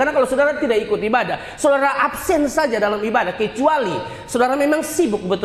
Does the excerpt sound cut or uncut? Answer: uncut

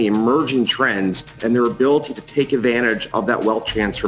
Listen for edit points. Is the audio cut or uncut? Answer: cut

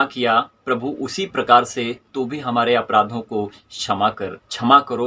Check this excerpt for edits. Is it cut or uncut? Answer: uncut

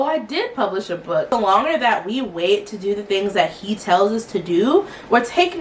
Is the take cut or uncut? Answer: cut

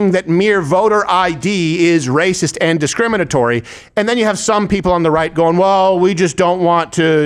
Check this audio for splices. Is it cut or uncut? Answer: uncut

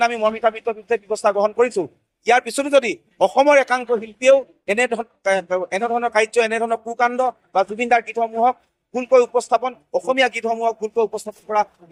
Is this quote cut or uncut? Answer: uncut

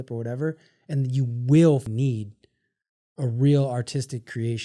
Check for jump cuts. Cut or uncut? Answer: cut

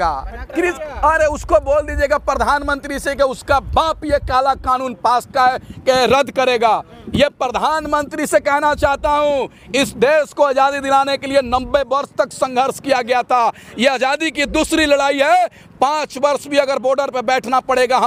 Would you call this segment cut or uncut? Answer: uncut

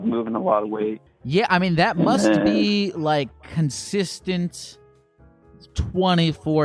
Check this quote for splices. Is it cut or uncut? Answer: cut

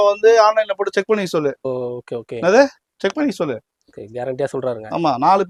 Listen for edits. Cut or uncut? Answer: uncut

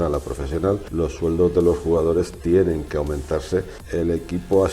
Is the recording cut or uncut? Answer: cut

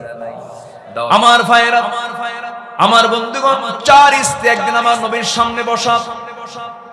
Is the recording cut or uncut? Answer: cut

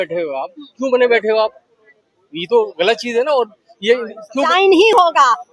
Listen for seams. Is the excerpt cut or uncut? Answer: cut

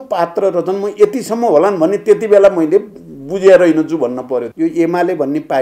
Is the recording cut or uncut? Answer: cut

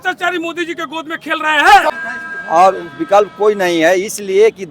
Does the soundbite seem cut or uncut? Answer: cut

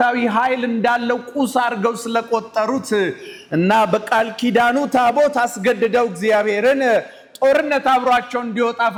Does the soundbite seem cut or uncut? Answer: uncut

